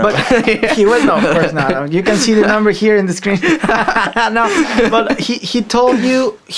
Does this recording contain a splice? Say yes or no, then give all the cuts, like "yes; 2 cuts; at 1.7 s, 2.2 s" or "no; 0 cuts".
no; 0 cuts